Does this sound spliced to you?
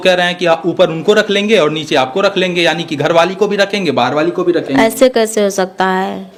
no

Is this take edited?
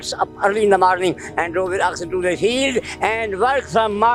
no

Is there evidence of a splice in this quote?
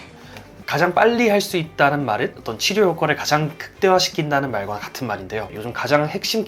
yes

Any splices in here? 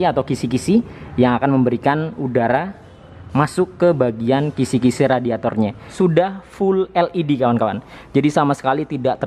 yes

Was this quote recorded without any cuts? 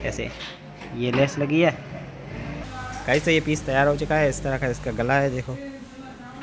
no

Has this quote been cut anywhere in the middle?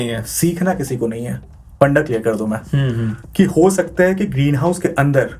yes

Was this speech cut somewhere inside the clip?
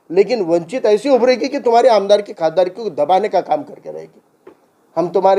no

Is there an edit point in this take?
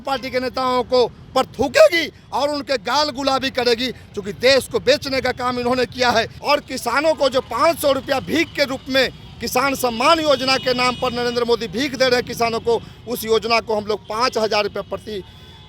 yes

